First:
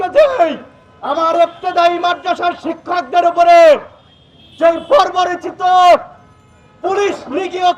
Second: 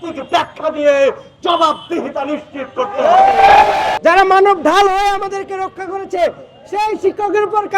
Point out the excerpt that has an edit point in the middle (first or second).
second